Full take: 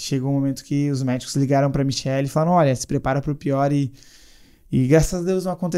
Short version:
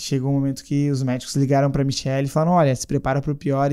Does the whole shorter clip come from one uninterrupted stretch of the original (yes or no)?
yes